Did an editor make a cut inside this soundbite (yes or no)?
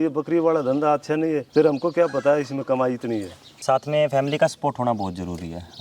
yes